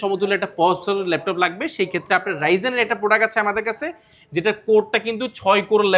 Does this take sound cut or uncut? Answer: uncut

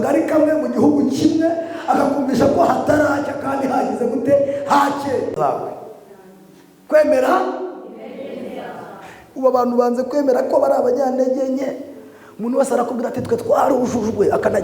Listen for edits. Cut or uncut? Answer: cut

